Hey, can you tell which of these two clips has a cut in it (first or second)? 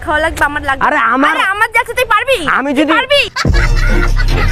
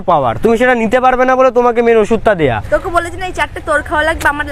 second